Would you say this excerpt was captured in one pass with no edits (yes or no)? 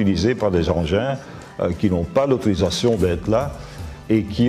yes